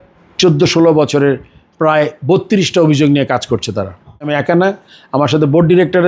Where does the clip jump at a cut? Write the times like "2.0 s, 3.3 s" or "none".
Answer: 4.3 s